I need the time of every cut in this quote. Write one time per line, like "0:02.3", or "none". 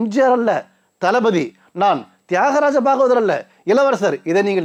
none